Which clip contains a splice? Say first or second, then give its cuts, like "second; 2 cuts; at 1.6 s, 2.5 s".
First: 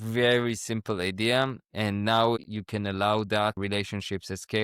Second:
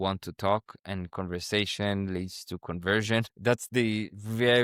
first; 2 cuts; at 2.4 s, 3.6 s